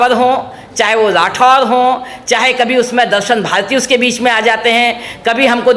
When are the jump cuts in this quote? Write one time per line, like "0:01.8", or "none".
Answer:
none